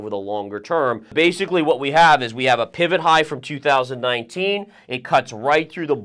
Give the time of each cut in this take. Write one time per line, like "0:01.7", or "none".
0:01.1